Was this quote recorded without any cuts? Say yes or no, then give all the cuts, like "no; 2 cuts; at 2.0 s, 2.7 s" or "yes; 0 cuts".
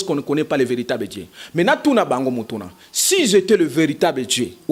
yes; 0 cuts